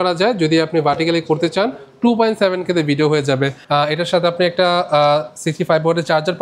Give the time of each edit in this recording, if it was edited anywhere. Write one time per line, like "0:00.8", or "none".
0:03.6